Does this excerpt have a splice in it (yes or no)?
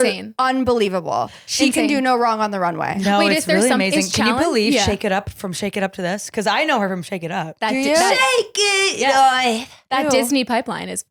no